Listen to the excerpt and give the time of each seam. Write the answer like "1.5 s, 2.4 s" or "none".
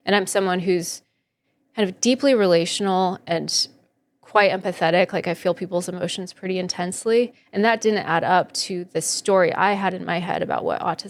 none